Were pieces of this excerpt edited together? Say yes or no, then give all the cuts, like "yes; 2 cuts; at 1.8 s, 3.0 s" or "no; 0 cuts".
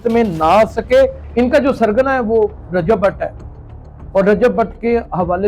yes; 1 cut; at 1.2 s